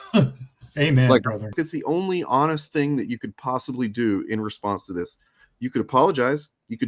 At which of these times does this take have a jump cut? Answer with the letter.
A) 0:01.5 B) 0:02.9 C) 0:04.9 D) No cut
A